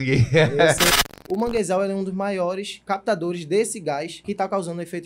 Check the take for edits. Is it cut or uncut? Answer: cut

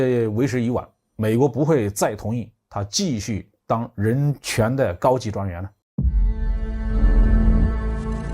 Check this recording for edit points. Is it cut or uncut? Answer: cut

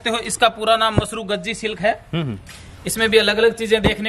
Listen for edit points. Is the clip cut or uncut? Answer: uncut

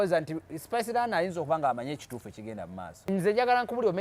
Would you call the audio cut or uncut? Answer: cut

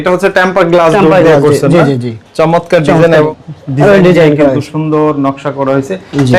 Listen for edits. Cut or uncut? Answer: uncut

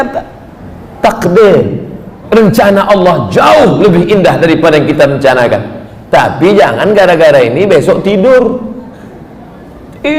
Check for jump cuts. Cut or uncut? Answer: uncut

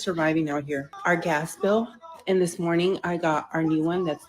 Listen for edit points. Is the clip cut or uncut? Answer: cut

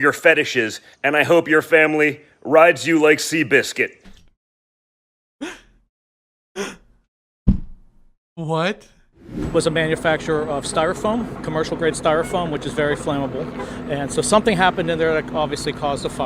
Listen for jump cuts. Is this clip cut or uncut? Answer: cut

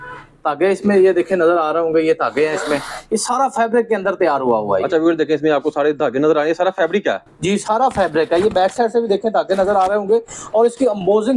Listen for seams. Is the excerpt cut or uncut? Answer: uncut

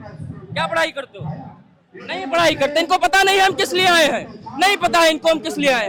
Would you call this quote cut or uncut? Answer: uncut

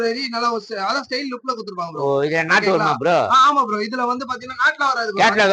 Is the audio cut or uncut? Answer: uncut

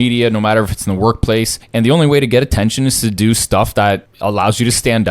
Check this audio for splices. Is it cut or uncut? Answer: cut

